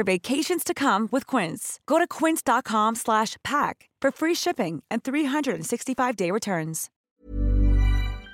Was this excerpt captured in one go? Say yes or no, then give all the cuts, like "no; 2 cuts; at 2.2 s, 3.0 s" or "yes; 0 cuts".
no; 1 cut; at 6.9 s